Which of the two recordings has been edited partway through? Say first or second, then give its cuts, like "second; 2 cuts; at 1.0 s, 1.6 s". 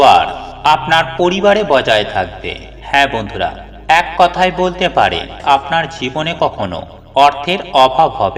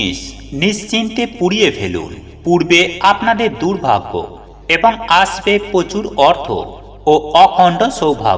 first; 1 cut; at 5.4 s